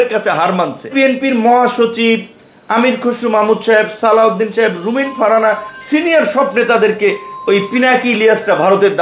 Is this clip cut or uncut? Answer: cut